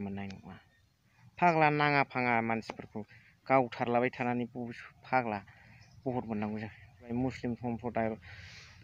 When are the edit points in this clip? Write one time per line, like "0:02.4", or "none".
0:07.1